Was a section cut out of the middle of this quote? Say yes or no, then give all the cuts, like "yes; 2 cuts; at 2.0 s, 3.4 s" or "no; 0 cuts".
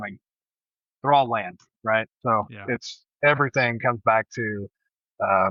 no; 0 cuts